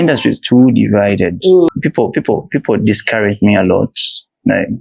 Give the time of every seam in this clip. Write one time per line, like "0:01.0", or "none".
0:01.7

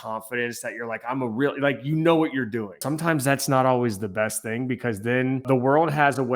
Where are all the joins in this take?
0:02.8
0:05.4

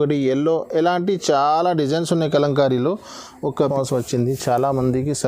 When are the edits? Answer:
0:03.6

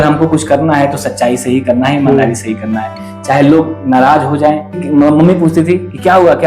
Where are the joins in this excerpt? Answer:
0:04.8

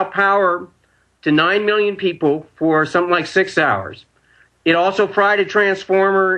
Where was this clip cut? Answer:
0:05.2

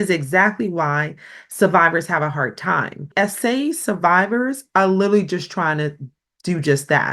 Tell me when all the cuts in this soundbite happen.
0:03.1

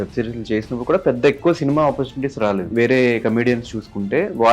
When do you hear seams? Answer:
0:02.7

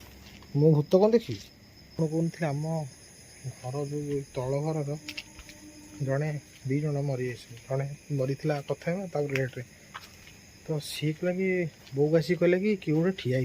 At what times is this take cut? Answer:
0:01.9

